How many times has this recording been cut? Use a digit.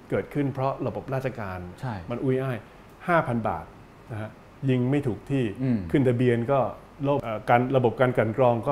1